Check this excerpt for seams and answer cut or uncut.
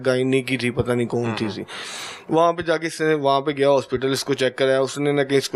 uncut